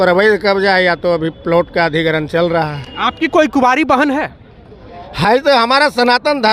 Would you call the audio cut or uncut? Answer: uncut